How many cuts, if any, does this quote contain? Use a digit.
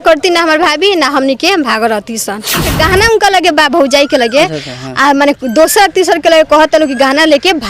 1